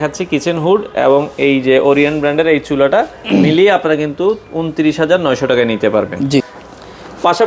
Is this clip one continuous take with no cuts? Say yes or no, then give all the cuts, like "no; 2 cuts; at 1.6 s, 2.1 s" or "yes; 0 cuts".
yes; 0 cuts